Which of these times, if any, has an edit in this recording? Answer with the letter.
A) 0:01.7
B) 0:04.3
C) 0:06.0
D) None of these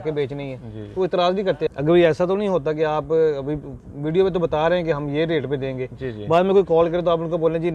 A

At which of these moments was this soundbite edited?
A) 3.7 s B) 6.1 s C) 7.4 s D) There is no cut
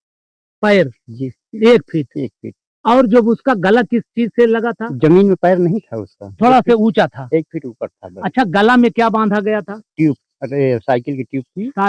D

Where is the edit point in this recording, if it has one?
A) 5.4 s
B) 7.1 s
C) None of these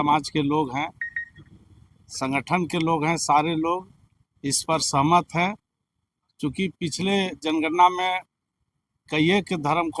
C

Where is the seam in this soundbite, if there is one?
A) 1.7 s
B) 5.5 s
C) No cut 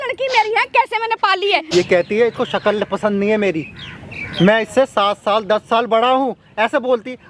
A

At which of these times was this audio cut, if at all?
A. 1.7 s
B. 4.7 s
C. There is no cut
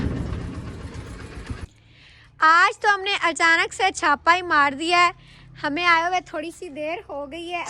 A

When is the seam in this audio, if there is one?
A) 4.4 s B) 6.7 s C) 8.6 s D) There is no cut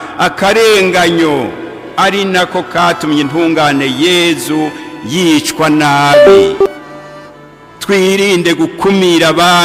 B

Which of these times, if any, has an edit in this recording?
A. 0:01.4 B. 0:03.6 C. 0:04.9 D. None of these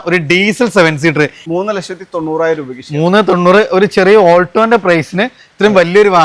A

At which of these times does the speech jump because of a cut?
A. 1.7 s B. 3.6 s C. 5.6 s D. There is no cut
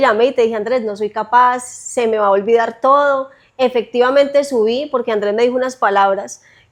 D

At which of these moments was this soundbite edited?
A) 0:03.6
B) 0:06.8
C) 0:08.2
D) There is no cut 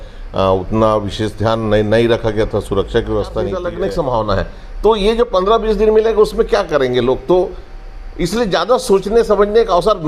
A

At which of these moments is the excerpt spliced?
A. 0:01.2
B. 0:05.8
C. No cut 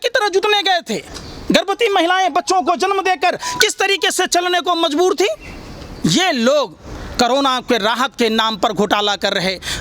B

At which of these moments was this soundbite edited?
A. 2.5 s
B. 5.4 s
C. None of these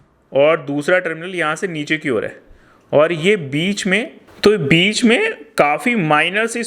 C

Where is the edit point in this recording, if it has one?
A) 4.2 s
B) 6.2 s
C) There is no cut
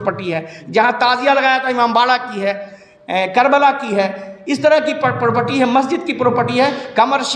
C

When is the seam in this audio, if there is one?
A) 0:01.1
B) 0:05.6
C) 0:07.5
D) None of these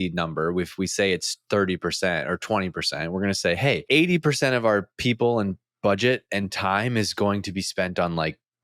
D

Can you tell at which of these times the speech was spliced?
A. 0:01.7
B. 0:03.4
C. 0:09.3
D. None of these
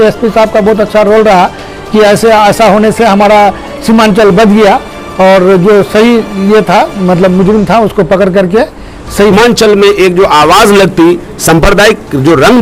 C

